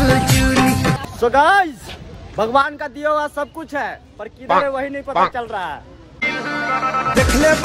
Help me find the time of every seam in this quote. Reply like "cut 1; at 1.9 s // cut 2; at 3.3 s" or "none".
cut 1; at 1.1 s